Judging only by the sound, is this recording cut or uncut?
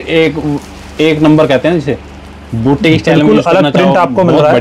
uncut